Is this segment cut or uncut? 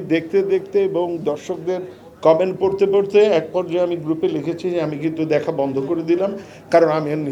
uncut